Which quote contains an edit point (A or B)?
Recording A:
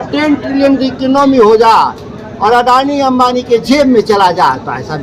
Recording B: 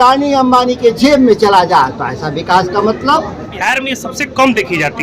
B